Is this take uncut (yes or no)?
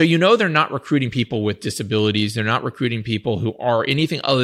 yes